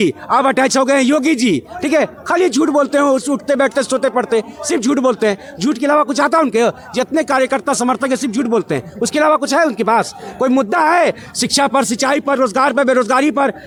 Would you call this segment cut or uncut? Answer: uncut